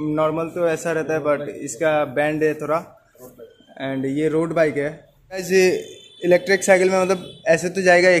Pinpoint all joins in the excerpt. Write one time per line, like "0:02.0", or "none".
0:05.4